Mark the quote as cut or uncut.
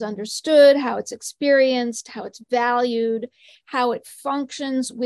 uncut